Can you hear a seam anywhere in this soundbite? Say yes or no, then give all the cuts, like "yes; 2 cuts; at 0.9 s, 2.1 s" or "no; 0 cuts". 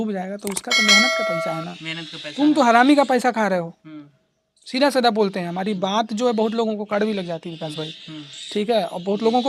no; 0 cuts